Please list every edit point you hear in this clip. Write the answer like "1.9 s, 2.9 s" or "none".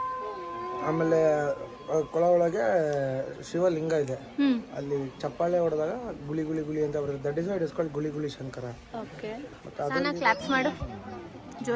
10.0 s